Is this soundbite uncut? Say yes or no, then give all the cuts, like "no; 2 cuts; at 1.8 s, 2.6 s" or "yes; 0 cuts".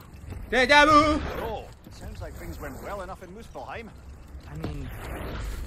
yes; 0 cuts